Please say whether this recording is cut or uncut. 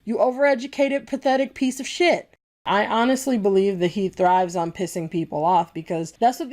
cut